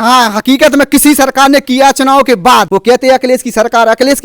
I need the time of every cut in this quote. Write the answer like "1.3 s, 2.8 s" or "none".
2.7 s